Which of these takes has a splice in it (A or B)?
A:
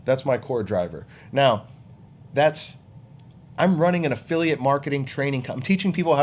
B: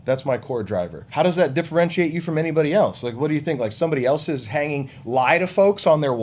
B